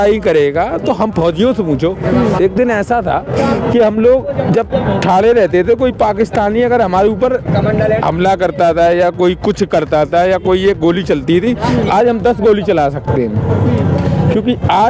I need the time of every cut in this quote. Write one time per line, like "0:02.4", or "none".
none